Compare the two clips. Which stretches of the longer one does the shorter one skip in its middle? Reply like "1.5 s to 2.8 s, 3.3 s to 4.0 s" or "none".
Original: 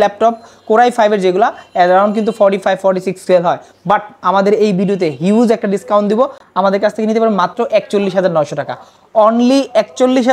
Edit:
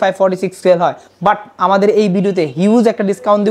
none